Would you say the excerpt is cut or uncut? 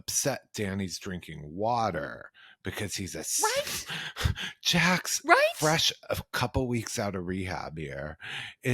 uncut